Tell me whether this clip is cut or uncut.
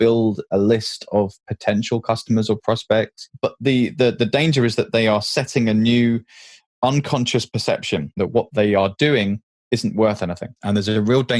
cut